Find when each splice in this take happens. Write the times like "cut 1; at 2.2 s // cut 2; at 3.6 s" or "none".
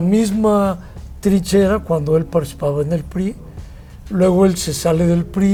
none